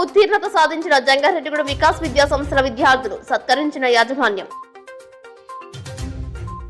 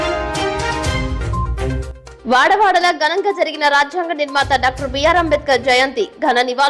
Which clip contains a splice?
second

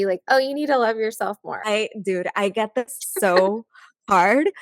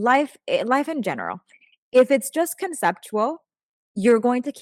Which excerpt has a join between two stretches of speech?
first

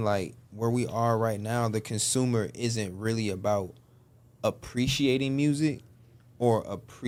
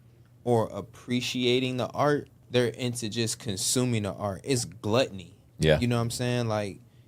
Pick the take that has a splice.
second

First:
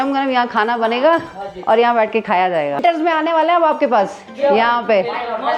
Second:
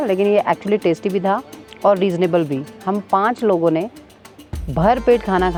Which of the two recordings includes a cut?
first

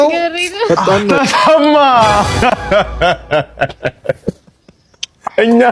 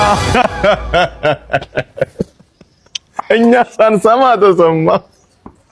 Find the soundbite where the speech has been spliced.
first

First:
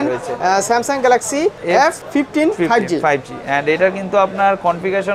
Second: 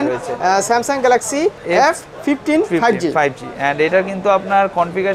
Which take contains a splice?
first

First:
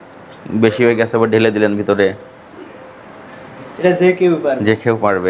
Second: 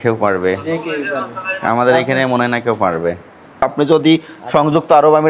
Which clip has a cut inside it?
second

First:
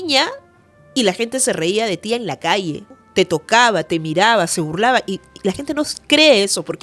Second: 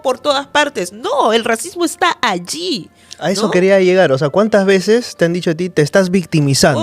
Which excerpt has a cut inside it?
first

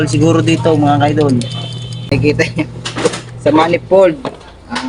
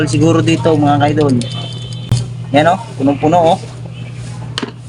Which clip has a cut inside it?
first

